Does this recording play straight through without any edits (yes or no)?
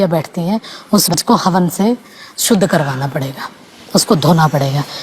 no